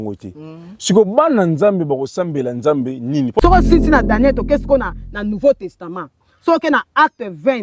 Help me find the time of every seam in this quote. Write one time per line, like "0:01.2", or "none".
0:03.4